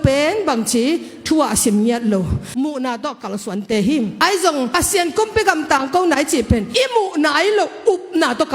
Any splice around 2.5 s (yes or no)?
yes